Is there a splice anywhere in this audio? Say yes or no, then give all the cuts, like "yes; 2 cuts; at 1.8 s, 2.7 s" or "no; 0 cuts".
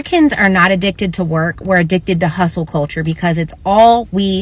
no; 0 cuts